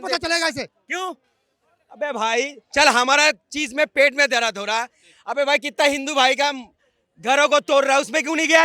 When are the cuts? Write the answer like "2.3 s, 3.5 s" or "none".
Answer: none